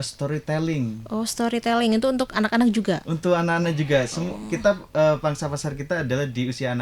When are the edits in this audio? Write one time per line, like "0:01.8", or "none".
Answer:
none